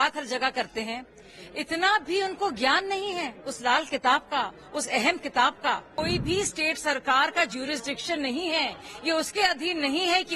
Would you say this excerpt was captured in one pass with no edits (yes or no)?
no